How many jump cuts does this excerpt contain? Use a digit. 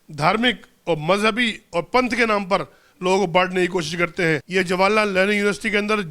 1